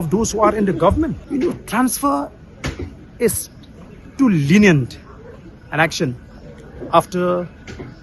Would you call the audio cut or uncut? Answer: cut